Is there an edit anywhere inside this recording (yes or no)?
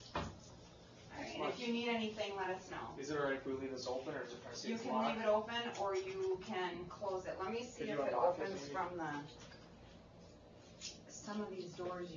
yes